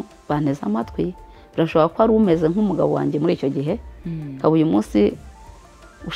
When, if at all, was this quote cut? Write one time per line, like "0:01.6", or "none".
none